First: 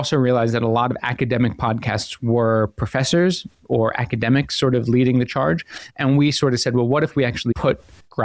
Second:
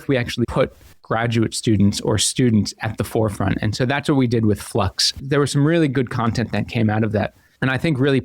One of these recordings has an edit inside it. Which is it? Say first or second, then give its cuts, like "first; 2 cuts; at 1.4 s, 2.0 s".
second; 1 cut; at 5.2 s